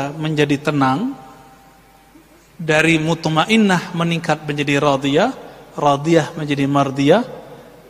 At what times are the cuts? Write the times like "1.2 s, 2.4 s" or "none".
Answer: none